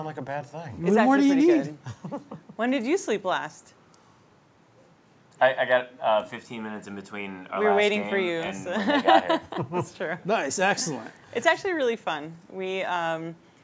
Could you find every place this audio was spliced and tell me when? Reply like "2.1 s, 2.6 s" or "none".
5.4 s